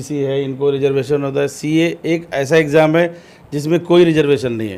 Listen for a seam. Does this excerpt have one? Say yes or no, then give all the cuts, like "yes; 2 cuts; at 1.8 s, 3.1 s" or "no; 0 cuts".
no; 0 cuts